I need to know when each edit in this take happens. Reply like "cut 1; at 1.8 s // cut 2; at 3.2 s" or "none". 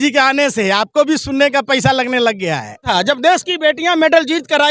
cut 1; at 2.8 s